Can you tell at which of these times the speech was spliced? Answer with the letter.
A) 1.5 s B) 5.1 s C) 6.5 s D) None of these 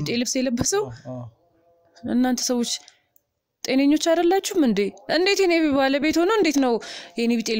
D